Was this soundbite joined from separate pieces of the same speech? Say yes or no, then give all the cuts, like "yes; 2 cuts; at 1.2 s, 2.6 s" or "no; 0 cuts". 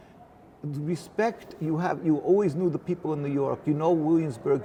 no; 0 cuts